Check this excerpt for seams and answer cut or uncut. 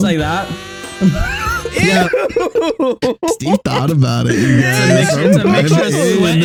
uncut